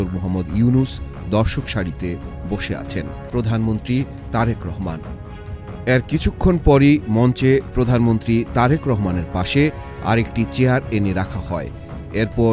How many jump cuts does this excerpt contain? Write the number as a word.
one